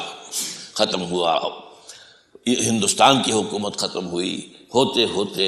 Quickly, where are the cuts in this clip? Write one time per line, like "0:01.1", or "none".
none